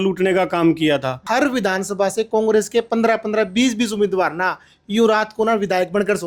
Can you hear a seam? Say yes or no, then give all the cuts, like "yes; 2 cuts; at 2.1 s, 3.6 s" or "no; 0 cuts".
yes; 1 cut; at 1.2 s